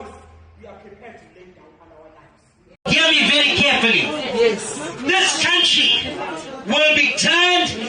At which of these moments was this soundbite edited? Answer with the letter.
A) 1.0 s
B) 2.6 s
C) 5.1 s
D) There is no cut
B